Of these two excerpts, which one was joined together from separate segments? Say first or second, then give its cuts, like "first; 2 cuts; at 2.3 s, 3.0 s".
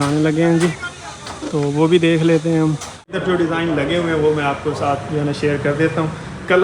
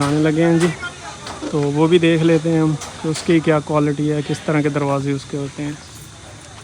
first; 1 cut; at 3.2 s